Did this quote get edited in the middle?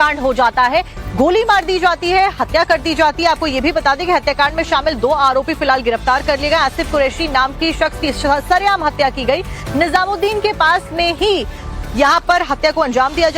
yes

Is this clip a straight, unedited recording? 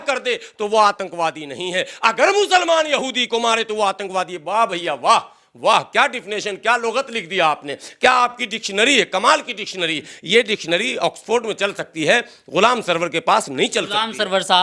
yes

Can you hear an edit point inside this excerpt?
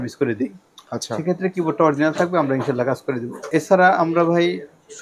yes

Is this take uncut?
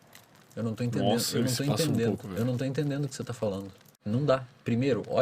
no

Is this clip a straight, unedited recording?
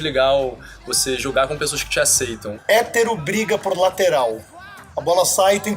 no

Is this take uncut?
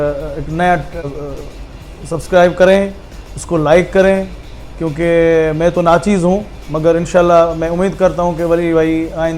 no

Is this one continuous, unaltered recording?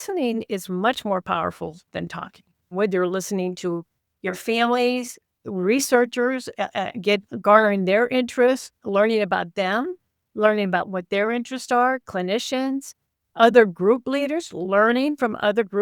no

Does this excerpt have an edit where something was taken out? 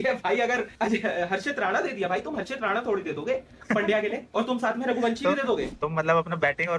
yes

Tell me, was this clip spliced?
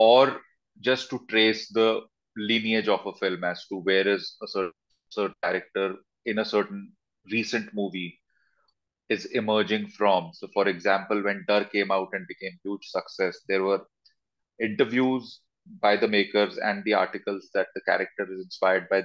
no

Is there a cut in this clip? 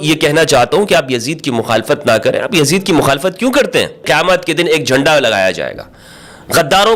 yes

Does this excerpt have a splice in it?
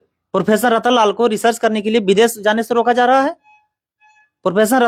no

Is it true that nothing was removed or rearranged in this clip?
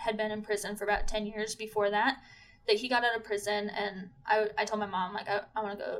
yes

